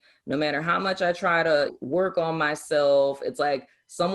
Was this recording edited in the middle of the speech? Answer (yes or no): yes